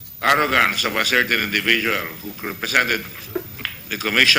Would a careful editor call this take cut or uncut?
cut